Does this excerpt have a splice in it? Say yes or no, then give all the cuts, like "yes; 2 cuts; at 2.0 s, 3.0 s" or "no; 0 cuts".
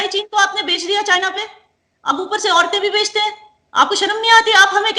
no; 0 cuts